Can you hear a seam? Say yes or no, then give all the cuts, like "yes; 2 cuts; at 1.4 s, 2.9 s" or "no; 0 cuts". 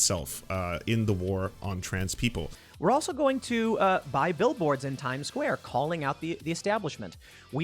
yes; 1 cut; at 2.6 s